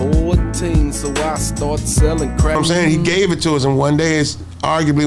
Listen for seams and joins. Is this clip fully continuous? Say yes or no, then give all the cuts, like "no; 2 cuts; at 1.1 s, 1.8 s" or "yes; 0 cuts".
no; 1 cut; at 2.6 s